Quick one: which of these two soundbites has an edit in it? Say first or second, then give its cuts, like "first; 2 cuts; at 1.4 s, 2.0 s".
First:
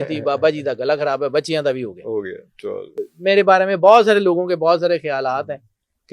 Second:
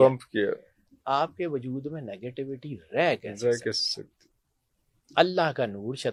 first; 1 cut; at 3.0 s